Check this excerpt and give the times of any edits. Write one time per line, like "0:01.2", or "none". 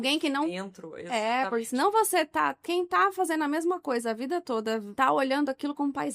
0:04.9